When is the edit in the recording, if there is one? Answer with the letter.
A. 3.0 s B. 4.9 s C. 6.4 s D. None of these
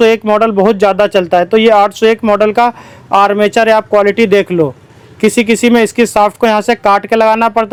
D